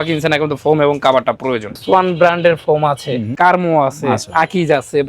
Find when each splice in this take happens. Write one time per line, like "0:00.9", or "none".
0:01.8
0:03.3